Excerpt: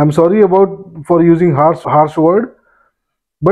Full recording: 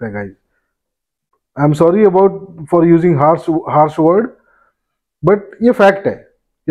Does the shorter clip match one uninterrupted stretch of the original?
no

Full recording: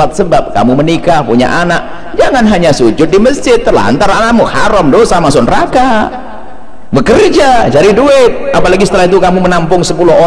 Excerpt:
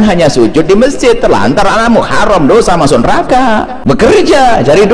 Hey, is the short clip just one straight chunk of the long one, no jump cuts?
no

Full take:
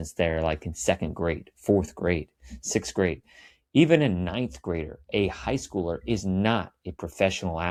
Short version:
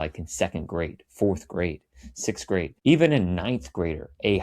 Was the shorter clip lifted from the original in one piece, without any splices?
no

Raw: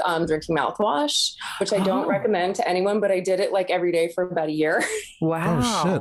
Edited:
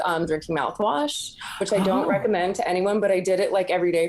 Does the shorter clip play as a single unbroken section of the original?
yes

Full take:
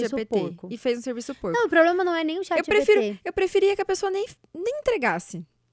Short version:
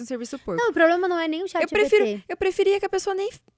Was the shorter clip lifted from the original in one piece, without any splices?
yes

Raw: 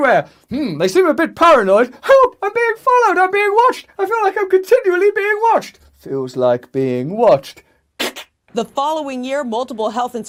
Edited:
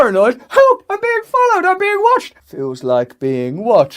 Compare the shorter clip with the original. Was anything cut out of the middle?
yes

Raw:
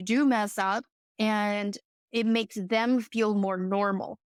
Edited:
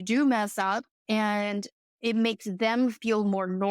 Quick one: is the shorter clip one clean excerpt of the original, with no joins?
no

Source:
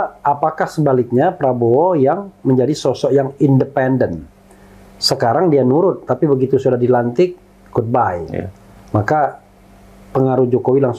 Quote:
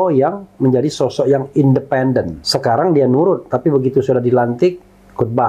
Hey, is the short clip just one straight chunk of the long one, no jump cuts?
no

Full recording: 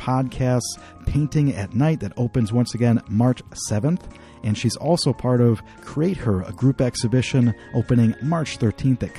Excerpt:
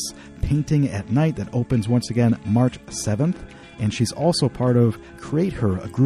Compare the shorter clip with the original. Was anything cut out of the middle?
no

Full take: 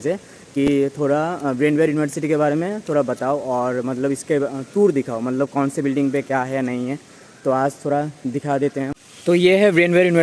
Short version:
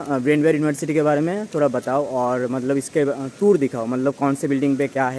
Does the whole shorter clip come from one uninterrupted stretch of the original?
yes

